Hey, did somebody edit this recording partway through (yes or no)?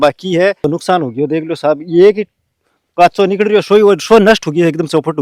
no